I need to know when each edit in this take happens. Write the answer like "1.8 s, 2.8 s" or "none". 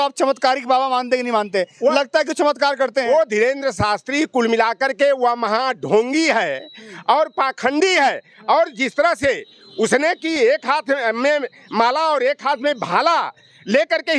none